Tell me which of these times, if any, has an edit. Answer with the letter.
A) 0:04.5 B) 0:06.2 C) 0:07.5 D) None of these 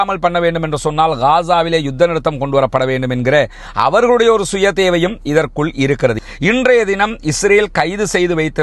B